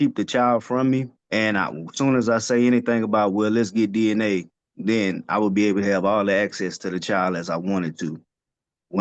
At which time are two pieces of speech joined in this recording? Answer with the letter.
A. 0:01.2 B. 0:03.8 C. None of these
A